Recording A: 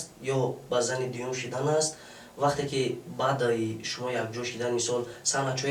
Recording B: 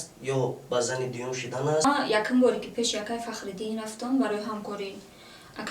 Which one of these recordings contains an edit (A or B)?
B